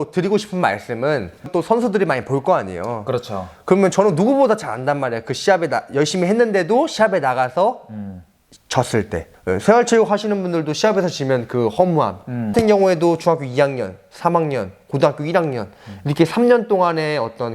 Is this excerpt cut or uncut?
cut